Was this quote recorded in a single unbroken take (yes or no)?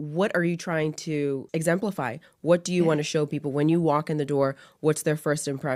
yes